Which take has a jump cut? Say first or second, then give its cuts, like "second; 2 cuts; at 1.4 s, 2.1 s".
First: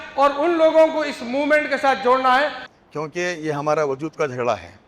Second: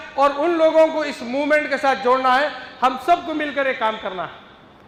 first; 1 cut; at 2.6 s